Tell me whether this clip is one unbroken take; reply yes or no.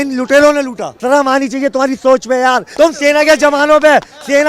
no